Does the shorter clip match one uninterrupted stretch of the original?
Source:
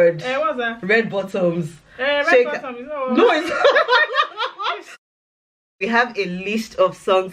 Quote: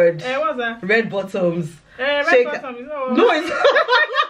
yes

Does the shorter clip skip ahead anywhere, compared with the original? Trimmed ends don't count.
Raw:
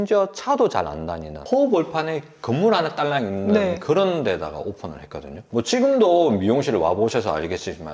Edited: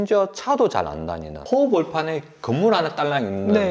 no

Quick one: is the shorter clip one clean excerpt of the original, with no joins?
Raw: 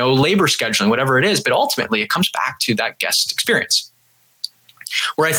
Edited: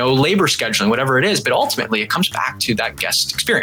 yes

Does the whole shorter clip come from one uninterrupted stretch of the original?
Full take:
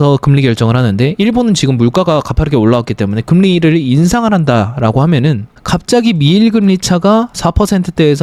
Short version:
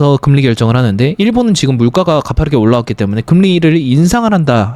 yes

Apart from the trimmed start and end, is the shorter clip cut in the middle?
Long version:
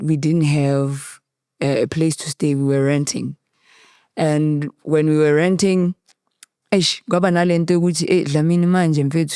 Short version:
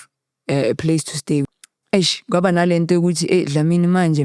yes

